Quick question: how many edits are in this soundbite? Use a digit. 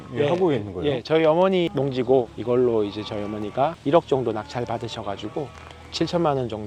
0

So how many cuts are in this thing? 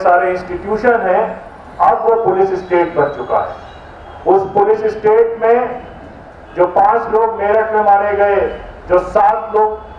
0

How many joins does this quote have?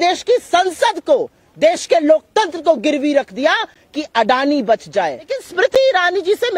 1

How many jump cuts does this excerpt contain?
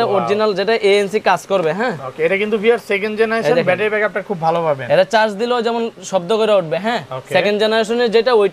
0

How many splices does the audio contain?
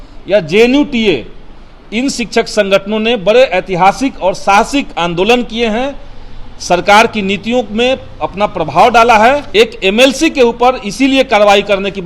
1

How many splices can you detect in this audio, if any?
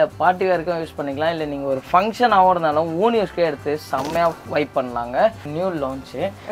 1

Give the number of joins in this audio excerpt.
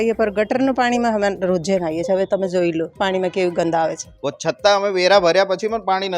2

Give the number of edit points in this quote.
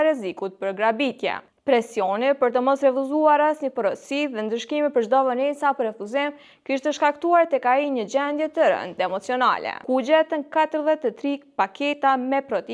2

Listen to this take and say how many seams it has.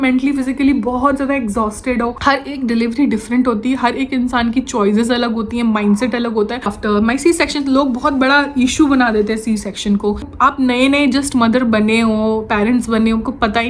3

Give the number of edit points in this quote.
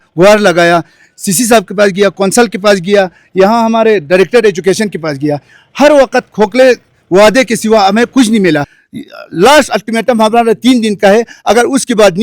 1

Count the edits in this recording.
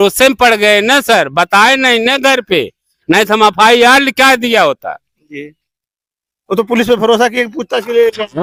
0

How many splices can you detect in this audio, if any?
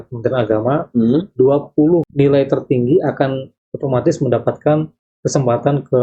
1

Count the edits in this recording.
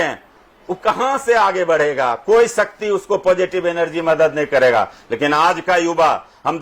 0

